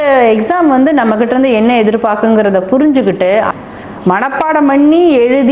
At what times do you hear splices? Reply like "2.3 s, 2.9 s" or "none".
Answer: 3.5 s